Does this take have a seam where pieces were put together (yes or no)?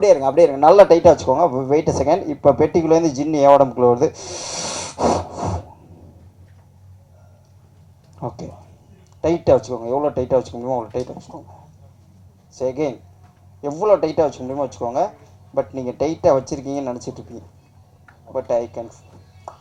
no